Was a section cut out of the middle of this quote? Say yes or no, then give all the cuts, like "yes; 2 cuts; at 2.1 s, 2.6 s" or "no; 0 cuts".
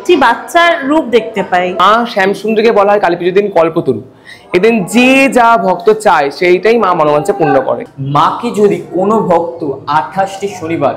yes; 2 cuts; at 1.8 s, 7.9 s